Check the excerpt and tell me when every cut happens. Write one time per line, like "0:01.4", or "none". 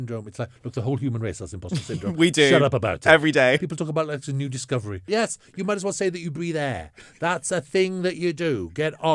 0:03.6
0:05.1